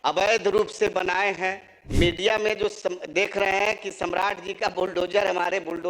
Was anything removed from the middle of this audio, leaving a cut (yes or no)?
yes